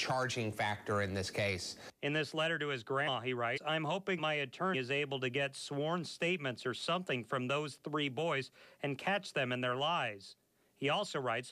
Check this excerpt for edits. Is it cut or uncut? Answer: uncut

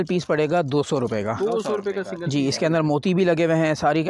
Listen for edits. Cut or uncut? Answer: uncut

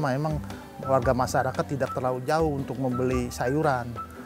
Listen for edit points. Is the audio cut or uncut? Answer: uncut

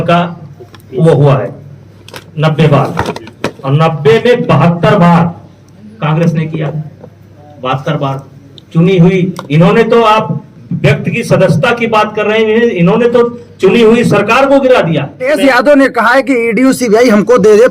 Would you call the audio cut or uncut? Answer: cut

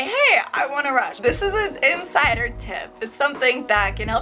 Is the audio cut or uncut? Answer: cut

